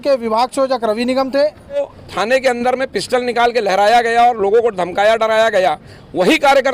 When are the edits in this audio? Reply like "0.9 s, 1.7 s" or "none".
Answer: 1.7 s